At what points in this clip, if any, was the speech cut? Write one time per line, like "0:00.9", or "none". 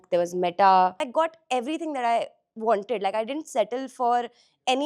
0:01.1